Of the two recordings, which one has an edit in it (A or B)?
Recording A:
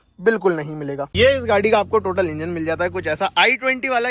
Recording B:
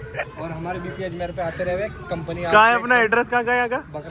A